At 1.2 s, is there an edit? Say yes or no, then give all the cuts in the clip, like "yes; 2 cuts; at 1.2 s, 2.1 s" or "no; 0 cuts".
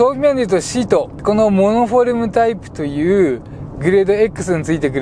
yes; 1 cut; at 1.2 s